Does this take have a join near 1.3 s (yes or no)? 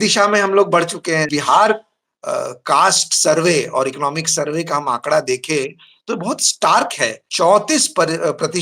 yes